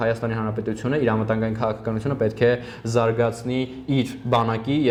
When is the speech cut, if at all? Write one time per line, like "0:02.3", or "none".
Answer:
none

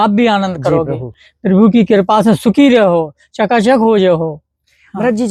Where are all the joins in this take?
none

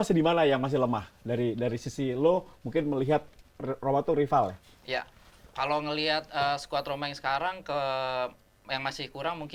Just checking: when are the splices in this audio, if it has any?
none

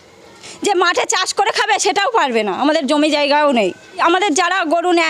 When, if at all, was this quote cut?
0:03.9

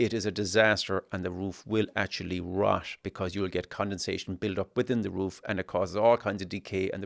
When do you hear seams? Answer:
0:03.0

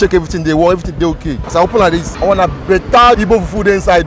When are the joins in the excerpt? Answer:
0:01.3
0:02.1

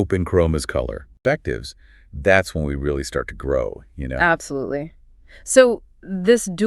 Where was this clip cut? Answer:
0:01.1

